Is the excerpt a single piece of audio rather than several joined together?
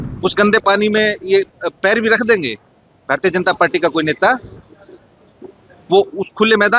yes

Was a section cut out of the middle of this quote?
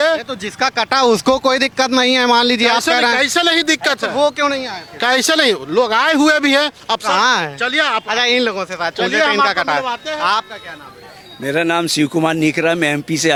no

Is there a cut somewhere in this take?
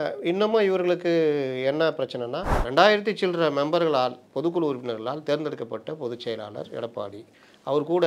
yes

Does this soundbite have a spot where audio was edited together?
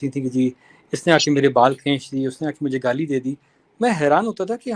no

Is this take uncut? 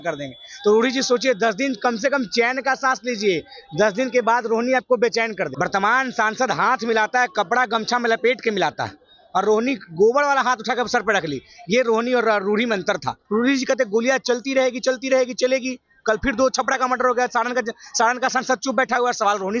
no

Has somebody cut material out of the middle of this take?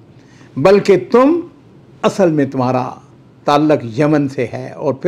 no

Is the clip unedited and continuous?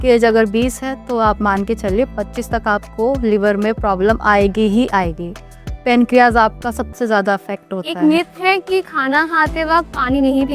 no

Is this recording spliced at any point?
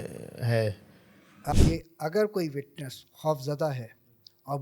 yes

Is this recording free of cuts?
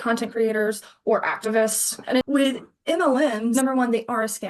no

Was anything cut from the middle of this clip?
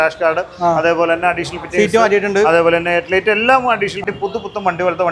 yes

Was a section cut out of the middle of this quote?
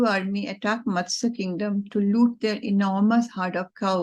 no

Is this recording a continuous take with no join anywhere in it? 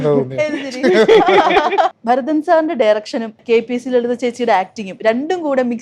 no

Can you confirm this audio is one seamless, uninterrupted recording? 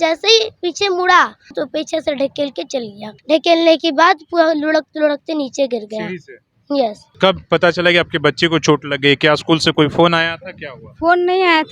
no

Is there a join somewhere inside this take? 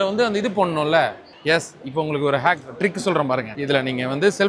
yes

